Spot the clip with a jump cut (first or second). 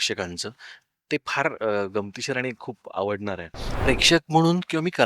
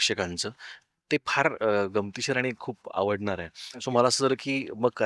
first